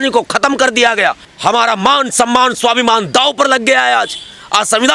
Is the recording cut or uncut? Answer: cut